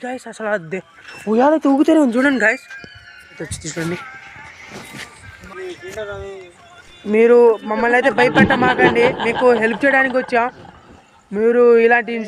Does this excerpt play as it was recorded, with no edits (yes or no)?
no